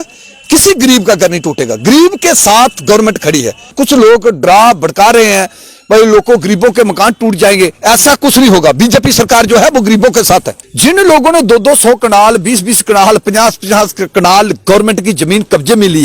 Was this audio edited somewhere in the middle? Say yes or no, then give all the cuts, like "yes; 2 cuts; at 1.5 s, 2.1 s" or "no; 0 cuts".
yes; 2 cuts; at 3.7 s, 10.6 s